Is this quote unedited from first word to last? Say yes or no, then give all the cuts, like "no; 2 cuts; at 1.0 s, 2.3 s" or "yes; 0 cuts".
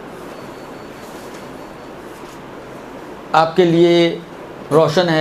yes; 0 cuts